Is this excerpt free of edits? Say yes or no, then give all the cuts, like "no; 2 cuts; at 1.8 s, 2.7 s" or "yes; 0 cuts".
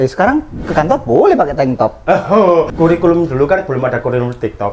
no; 1 cut; at 2.7 s